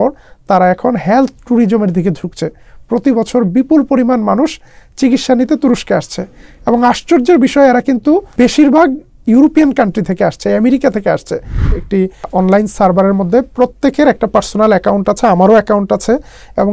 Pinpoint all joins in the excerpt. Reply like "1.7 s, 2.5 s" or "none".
8.3 s, 11.7 s